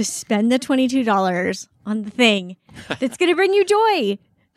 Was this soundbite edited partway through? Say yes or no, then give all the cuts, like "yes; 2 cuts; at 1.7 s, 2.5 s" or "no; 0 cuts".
no; 0 cuts